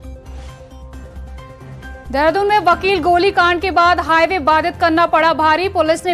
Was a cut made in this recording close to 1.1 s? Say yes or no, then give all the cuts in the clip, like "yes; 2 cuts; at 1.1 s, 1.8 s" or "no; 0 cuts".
no; 0 cuts